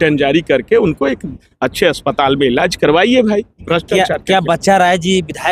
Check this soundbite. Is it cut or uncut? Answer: cut